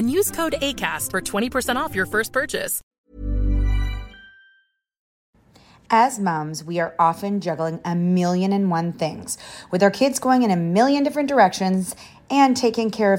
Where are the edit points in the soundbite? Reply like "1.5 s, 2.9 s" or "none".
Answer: 2.8 s